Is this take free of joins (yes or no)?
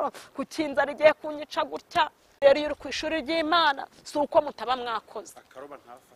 no